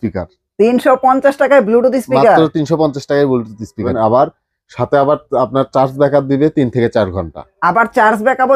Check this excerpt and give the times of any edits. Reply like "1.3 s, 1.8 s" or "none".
none